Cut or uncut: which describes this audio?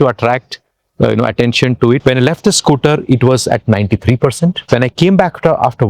cut